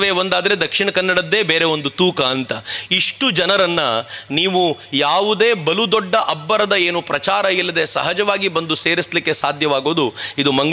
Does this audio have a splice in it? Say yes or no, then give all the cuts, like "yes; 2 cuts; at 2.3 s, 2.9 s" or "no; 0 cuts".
no; 0 cuts